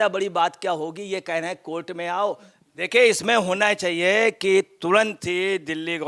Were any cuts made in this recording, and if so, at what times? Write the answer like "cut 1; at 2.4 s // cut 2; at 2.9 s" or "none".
cut 1; at 2.6 s